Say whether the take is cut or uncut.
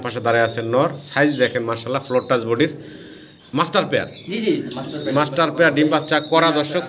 uncut